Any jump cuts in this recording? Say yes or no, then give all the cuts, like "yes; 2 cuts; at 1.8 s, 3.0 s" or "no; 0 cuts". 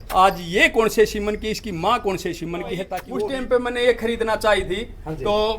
yes; 1 cut; at 3.0 s